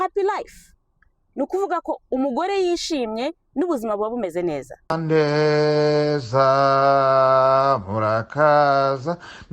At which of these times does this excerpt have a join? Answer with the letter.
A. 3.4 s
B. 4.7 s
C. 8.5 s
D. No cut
B